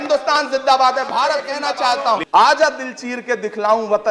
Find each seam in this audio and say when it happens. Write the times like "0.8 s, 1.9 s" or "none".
1.8 s